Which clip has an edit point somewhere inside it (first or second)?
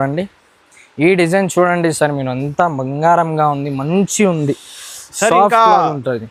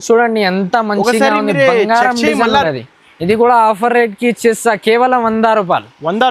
second